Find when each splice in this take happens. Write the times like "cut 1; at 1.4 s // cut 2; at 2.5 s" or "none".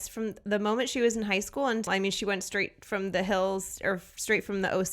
cut 1; at 1.9 s